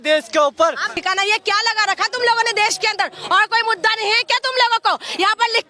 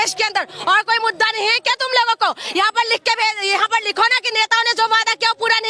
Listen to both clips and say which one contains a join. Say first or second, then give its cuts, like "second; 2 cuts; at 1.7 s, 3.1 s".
first; 1 cut; at 1.0 s